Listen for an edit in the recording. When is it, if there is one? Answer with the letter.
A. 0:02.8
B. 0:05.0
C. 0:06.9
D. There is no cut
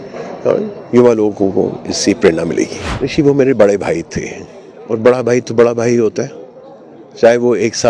A